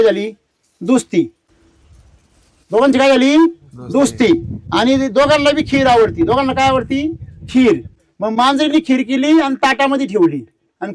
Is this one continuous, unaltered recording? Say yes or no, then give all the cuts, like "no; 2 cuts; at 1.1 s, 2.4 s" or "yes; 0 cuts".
yes; 0 cuts